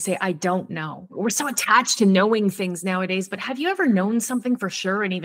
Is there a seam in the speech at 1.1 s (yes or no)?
yes